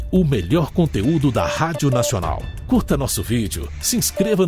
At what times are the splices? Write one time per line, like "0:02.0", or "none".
0:02.5